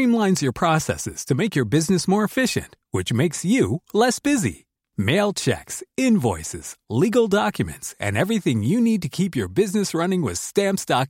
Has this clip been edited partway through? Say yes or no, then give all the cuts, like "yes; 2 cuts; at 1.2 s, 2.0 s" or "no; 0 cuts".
no; 0 cuts